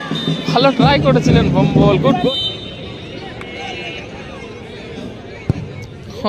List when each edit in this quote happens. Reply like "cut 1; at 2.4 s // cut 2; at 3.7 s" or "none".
cut 1; at 2.1 s